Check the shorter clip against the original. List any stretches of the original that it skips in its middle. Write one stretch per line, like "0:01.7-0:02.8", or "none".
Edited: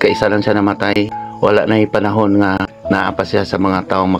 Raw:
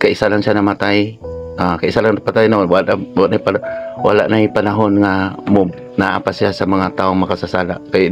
0:01.2-0:03.9
0:05.3-0:05.8

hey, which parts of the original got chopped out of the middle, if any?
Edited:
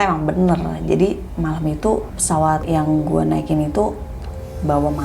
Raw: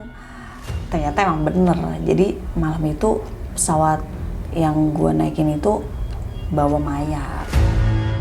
0:03.5-0:04.2

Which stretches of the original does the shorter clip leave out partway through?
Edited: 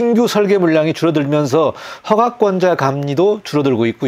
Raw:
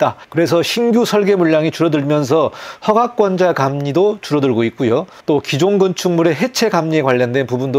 none

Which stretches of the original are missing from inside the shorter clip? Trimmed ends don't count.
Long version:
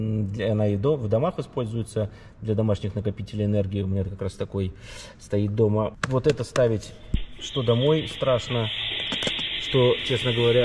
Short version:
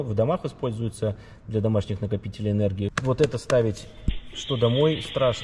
0:03.9-0:06.0

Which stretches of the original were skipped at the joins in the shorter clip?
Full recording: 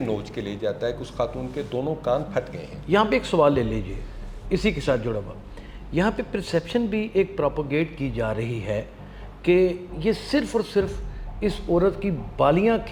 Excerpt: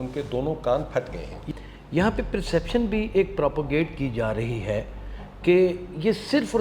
0:02.8-0:05.4

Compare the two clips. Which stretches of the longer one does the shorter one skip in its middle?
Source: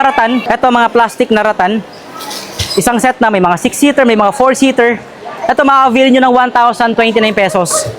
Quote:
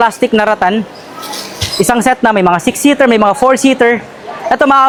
none

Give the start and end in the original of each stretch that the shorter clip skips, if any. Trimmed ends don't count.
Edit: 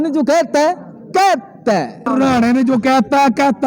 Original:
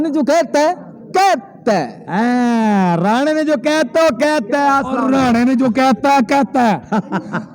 0:02.0-0:04.9

